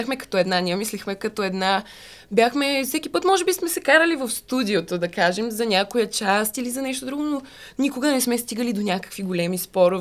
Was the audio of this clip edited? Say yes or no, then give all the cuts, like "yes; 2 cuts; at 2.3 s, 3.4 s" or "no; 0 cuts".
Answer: no; 0 cuts